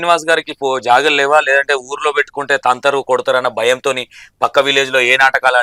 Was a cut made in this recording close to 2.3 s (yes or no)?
no